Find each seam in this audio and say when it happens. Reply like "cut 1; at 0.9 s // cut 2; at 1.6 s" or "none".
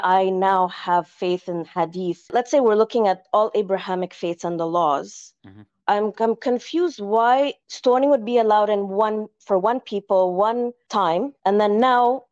cut 1; at 2.3 s